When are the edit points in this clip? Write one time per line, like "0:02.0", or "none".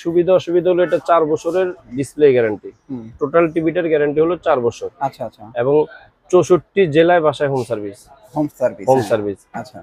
none